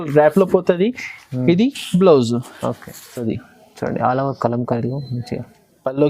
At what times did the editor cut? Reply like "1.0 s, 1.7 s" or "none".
3.2 s